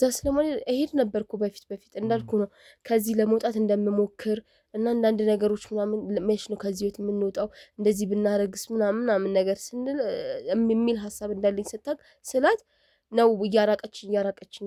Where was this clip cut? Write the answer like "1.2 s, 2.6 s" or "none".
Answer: none